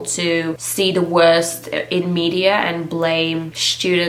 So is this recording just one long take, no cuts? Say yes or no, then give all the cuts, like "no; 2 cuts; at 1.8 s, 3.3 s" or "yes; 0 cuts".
yes; 0 cuts